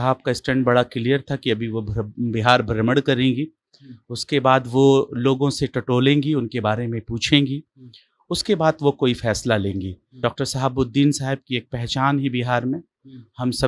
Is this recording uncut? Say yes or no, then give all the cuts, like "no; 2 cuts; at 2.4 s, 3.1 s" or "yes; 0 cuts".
no; 1 cut; at 10.2 s